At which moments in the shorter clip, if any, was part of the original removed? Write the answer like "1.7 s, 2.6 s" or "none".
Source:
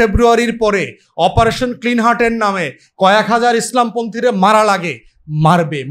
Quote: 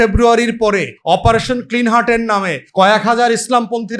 0.9 s, 2.6 s